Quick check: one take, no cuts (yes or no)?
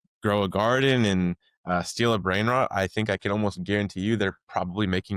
yes